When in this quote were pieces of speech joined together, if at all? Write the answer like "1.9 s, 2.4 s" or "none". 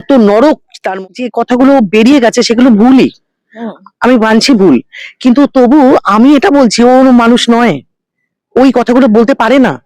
1.0 s